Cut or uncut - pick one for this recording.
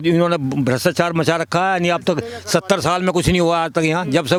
uncut